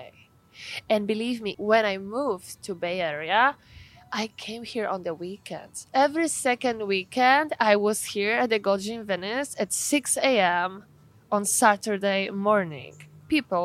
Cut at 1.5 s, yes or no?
yes